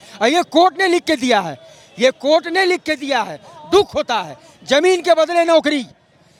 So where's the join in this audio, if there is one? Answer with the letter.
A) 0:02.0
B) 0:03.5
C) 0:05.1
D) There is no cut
D